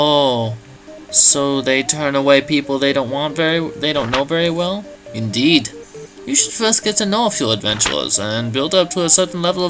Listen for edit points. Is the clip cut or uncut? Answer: uncut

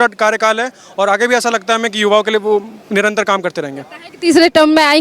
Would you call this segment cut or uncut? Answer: uncut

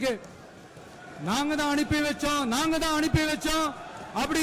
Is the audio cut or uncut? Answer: uncut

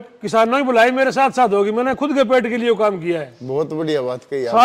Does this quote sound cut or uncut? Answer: uncut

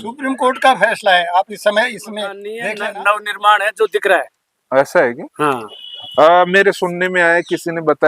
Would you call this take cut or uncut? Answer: cut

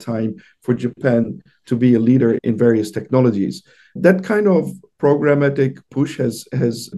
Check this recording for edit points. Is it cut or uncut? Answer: uncut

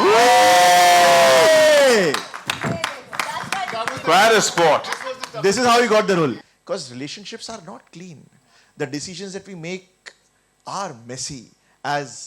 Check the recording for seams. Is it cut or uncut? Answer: cut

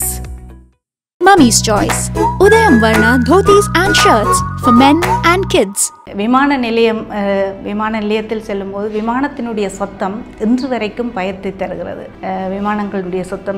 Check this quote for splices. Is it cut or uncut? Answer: cut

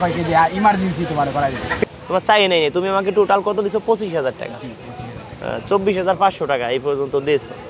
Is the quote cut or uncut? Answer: uncut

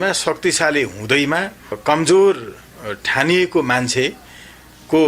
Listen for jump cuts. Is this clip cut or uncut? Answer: cut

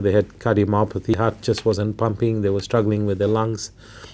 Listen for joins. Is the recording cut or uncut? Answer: cut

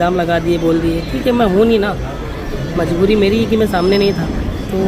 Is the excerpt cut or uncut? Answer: uncut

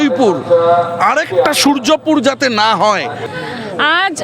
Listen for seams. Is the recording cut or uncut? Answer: cut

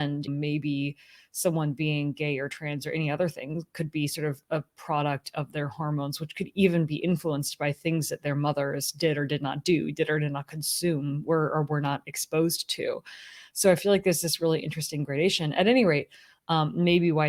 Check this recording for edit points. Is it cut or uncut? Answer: uncut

